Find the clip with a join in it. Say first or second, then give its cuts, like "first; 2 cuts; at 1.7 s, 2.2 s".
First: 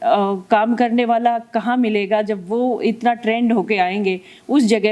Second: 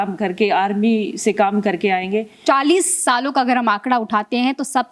second; 1 cut; at 2.3 s